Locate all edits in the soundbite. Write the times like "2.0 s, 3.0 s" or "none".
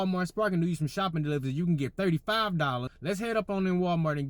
2.9 s